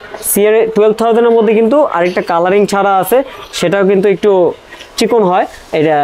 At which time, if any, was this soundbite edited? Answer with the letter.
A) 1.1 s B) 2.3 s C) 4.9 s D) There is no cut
D